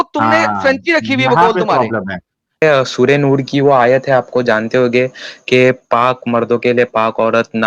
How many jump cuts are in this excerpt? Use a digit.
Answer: 1